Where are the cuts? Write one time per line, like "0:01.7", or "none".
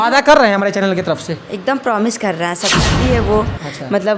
0:02.9